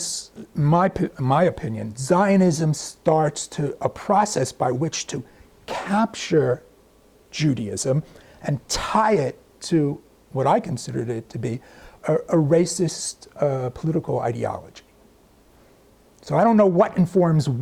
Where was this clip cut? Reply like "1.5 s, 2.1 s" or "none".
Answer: none

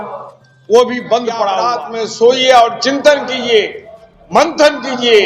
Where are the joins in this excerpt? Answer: 1.8 s

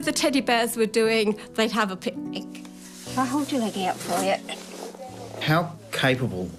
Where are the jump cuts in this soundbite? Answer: none

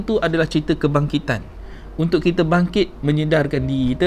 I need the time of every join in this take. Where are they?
none

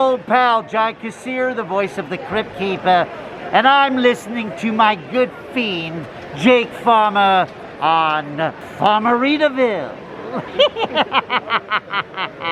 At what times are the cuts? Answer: 8.6 s, 10.4 s

